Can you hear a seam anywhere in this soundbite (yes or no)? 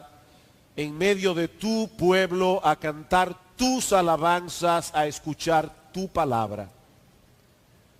no